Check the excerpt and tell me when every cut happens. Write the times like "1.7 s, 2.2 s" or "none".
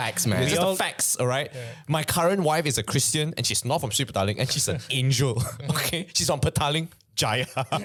none